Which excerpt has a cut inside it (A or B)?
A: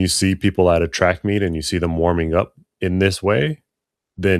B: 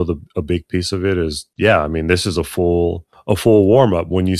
B